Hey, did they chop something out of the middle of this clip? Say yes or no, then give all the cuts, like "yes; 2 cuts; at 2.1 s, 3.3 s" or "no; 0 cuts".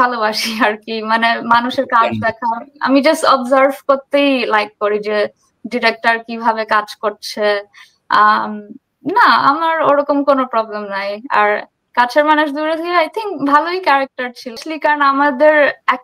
yes; 1 cut; at 14.6 s